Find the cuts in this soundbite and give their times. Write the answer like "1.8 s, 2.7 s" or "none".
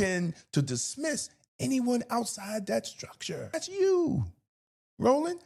3.5 s